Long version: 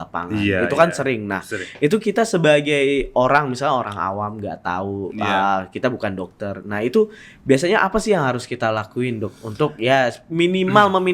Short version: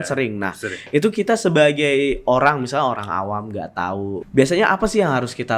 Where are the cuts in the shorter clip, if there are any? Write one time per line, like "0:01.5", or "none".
0:04.2